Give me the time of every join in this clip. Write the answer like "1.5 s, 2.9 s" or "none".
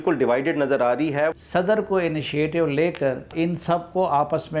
1.4 s, 3.3 s